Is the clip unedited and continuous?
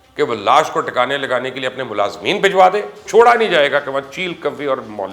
no; 1 cut; at 3.0 s

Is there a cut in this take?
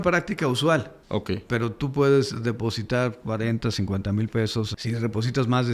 yes; 1 cut; at 1.3 s

